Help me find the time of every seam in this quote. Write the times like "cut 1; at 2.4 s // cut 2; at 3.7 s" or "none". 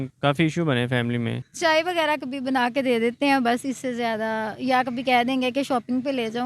cut 1; at 1.4 s